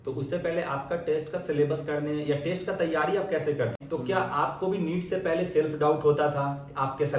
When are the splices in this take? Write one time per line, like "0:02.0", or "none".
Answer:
0:03.8